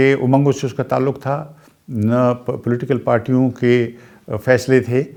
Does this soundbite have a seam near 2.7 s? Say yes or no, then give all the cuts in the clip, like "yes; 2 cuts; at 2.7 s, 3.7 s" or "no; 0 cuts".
no; 0 cuts